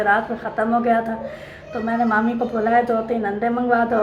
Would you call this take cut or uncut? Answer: uncut